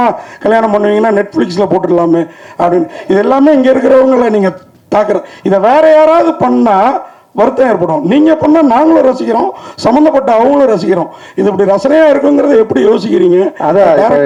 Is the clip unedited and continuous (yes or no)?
yes